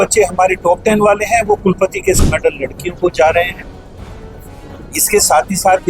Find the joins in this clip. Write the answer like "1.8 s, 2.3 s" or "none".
2.2 s

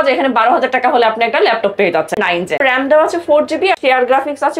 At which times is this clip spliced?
2.5 s, 3.8 s

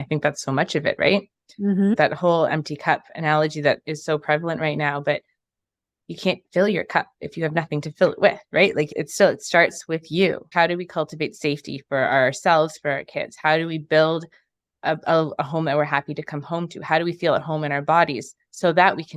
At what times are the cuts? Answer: 1.9 s, 10.5 s

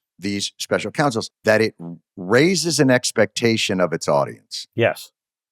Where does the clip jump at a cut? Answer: 1.3 s

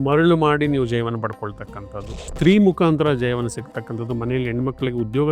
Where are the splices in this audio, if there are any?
2.2 s

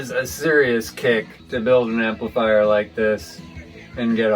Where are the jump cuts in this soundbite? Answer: 1.4 s

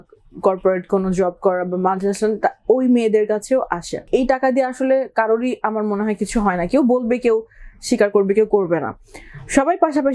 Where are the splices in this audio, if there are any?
4.0 s

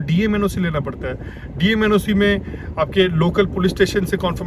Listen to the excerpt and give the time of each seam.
none

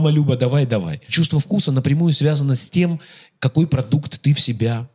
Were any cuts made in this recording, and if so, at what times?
1.0 s

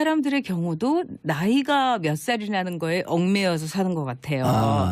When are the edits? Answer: 3.6 s

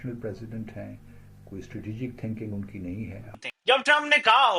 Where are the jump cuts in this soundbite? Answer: 3.4 s

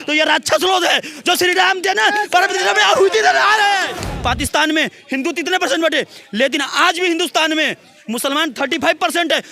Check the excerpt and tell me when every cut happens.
4.1 s

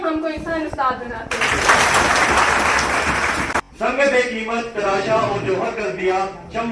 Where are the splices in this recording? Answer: 3.4 s

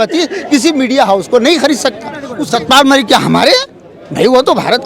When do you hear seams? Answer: 2.2 s

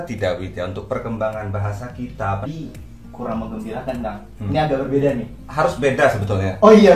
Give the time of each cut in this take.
2.5 s

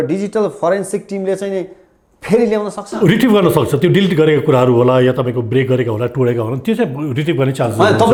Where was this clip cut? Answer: none

